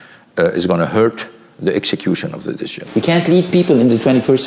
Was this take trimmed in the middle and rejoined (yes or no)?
yes